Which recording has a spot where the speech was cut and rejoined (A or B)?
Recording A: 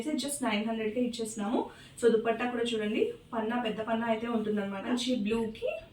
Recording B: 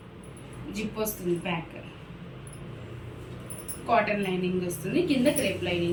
A